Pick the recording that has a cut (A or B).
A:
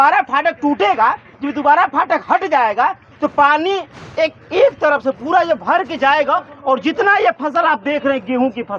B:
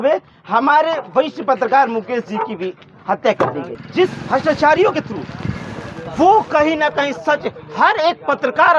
B